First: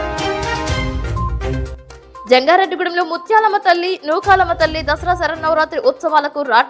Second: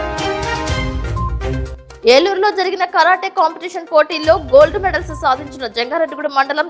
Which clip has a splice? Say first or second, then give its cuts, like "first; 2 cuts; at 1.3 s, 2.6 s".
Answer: second; 1 cut; at 1.7 s